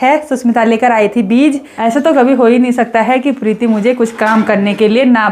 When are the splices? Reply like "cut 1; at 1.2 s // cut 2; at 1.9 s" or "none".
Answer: cut 1; at 1.7 s